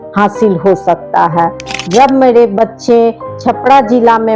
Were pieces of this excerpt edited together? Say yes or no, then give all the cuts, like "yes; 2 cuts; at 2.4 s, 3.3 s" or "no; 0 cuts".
yes; 1 cut; at 1.7 s